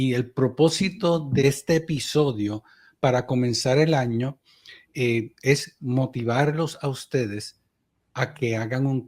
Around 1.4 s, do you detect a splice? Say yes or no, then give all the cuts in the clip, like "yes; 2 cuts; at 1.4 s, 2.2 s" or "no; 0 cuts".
yes; 1 cut; at 1.4 s